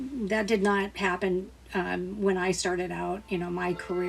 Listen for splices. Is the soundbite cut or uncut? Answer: uncut